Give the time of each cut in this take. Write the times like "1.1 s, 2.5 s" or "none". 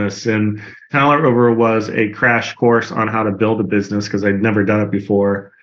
0.9 s